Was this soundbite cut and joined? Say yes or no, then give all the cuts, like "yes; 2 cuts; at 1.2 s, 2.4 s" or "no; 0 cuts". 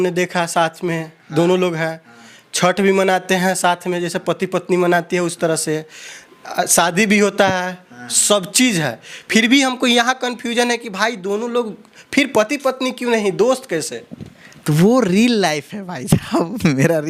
no; 0 cuts